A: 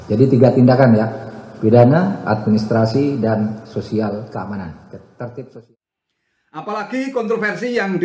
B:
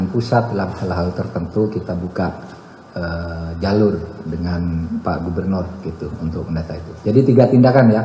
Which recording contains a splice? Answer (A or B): A